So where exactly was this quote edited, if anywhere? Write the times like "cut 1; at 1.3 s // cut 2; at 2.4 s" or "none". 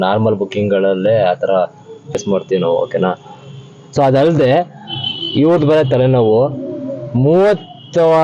cut 1; at 2.1 s